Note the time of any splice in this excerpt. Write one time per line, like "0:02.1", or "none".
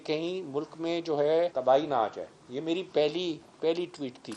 0:01.5